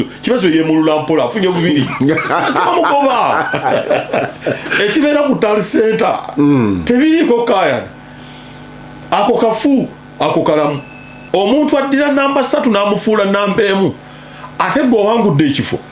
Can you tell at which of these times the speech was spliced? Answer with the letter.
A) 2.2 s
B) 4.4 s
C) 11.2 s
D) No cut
C